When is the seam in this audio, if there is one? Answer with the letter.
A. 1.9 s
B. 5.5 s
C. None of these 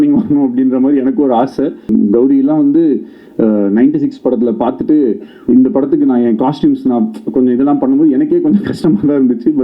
A